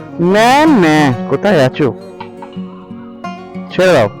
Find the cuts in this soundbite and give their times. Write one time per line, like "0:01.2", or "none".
0:01.9
0:03.1